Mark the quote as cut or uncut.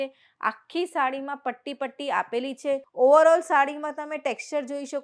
cut